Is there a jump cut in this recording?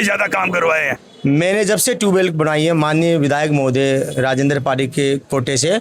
yes; 1 cut; at 1.0 s

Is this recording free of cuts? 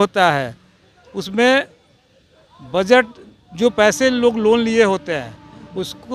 yes; 0 cuts

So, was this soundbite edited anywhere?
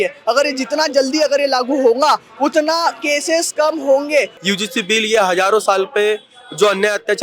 yes; 1 cut; at 4.3 s

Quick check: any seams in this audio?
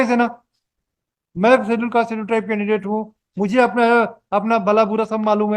no; 0 cuts

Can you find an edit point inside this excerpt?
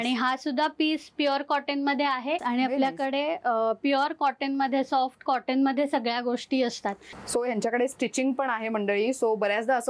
yes; 2 cuts; at 2.4 s, 7.1 s

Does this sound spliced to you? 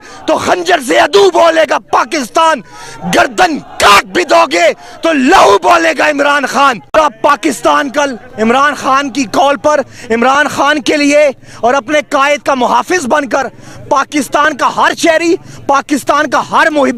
no; 0 cuts

